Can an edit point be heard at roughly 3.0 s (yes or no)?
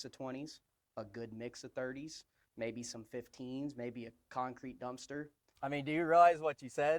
no